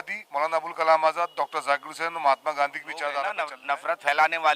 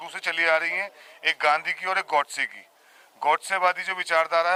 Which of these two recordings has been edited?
first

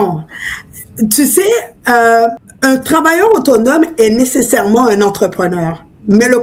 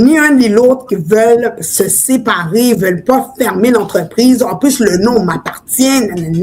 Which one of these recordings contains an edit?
second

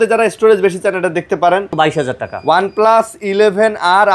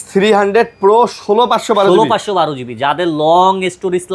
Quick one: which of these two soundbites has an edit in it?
first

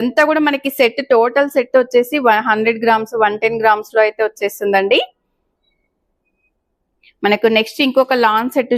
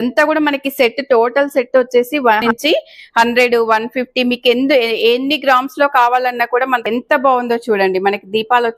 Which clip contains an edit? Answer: second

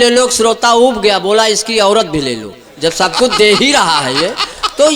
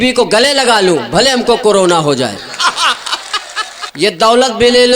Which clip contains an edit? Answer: second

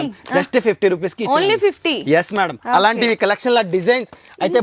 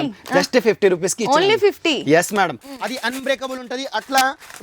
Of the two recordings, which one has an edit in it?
second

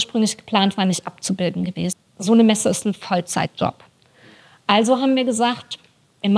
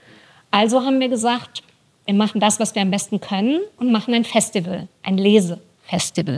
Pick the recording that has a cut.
first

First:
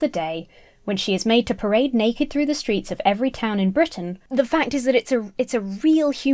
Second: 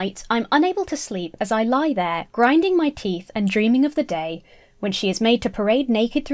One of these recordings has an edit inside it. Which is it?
first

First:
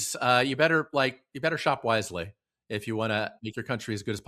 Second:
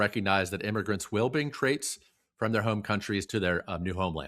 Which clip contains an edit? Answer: second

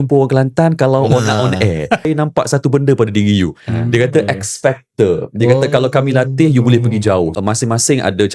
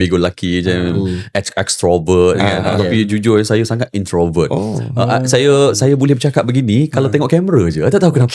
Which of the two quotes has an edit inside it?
first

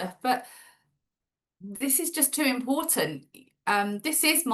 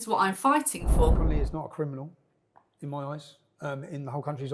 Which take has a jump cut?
second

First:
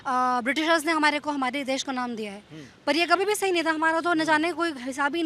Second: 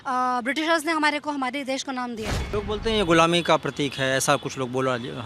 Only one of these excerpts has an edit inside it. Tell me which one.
second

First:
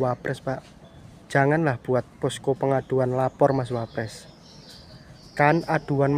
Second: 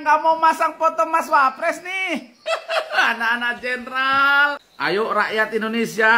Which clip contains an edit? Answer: second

